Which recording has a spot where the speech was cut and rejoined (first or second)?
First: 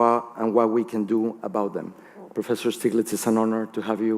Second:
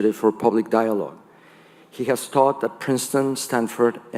first